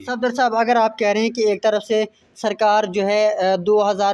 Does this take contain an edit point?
no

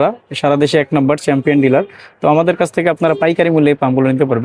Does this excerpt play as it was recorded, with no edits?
yes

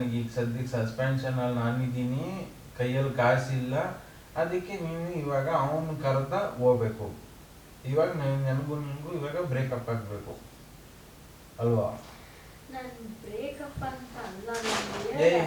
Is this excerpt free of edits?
no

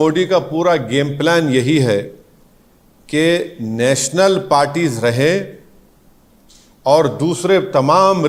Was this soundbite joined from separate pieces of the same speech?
no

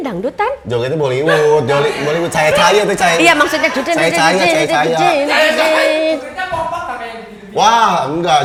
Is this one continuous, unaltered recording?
yes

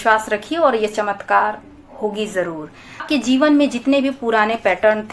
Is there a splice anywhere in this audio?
yes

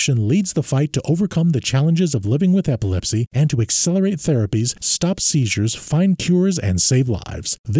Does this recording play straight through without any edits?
yes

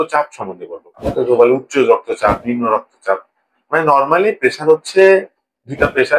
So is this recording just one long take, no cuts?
no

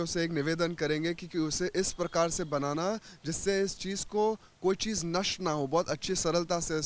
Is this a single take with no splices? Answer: yes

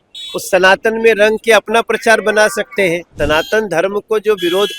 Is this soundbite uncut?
no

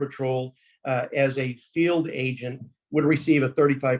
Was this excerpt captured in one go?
yes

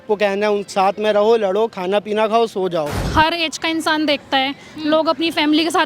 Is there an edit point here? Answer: yes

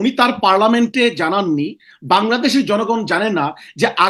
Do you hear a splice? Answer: no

